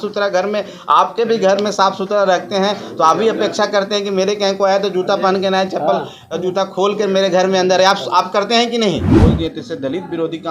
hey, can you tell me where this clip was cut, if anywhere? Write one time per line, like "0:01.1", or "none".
0:09.1

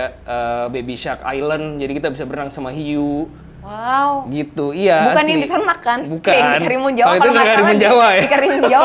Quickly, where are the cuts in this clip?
none

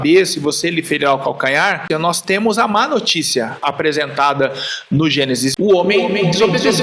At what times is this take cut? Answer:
0:01.8
0:05.5

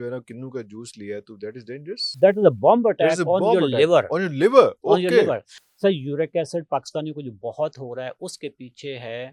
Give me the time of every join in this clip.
0:02.1
0:05.5

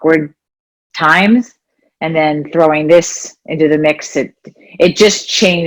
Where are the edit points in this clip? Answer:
none

